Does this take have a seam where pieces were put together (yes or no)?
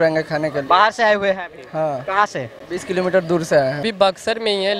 yes